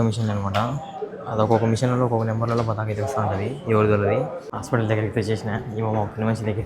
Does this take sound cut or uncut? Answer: cut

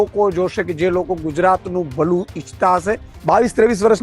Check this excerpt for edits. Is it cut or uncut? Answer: cut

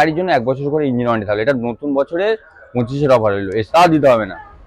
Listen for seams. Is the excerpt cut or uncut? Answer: cut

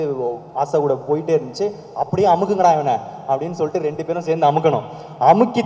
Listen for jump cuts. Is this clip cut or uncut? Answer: uncut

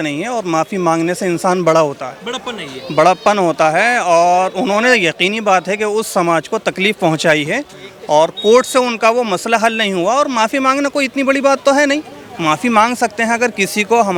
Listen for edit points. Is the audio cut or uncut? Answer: uncut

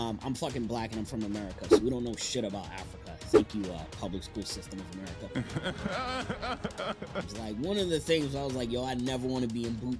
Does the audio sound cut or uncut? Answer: cut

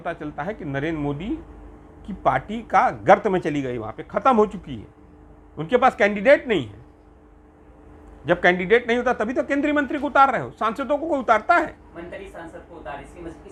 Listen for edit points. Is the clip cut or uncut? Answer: uncut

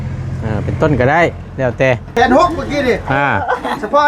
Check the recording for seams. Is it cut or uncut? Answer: cut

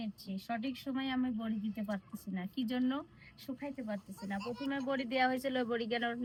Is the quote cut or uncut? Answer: uncut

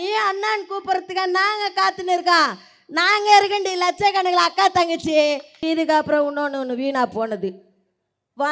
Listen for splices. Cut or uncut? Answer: cut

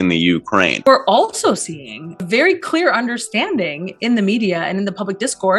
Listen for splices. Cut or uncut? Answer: cut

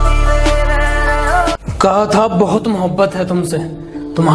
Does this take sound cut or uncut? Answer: cut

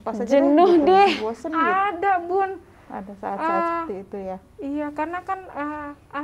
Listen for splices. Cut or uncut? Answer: uncut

